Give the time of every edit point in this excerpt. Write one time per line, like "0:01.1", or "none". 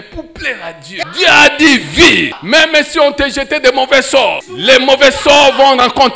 0:01.0
0:02.4
0:04.5